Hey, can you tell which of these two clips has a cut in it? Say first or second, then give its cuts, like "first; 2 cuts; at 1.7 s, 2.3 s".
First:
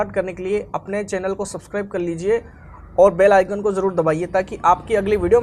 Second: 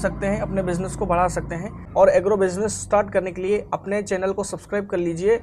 second; 1 cut; at 1.8 s